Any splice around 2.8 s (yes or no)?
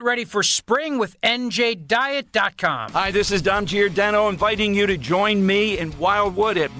yes